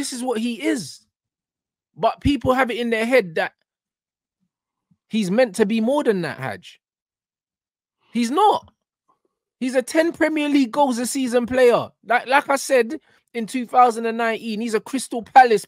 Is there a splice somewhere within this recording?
no; 0 cuts

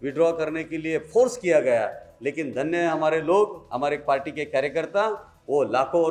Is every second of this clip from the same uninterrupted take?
yes; 0 cuts

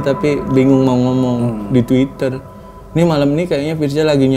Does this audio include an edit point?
no; 0 cuts

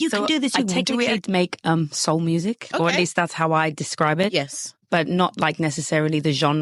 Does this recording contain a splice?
yes; 1 cut; at 1.2 s

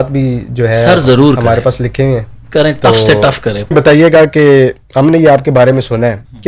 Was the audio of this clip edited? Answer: yes; 1 cut; at 3.7 s

